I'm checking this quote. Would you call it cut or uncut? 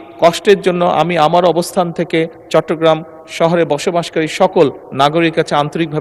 uncut